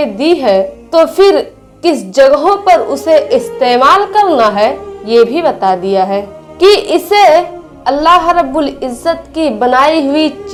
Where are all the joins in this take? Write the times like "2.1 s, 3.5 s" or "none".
none